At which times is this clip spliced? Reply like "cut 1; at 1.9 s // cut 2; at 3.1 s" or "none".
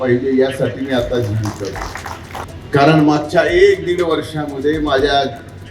cut 1; at 2.5 s

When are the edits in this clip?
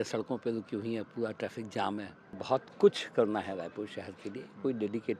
cut 1; at 2.4 s

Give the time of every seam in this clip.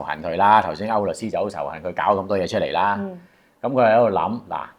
none

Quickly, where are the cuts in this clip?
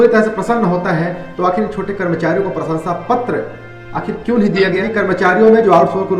cut 1; at 4.9 s

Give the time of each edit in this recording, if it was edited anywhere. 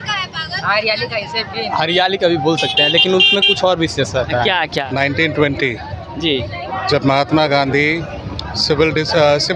cut 1; at 4.8 s

